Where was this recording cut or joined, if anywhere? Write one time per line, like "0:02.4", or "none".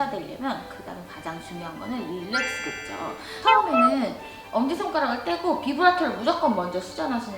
0:03.4